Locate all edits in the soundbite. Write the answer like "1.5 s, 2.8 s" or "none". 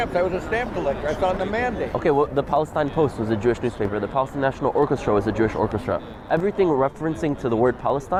none